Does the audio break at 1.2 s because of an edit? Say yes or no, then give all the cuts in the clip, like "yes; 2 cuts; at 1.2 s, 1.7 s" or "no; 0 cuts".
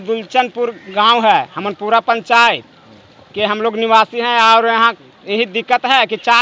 no; 0 cuts